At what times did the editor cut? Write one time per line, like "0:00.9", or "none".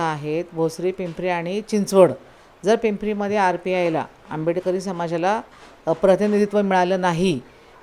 none